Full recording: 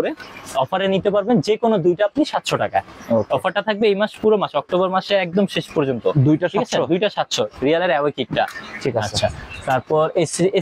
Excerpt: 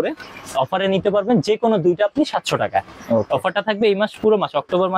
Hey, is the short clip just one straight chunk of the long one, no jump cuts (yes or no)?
yes